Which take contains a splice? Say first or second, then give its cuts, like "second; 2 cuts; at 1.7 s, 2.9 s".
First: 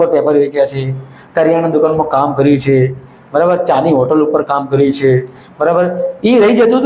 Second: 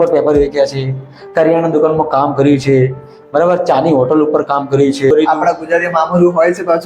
second; 1 cut; at 5.1 s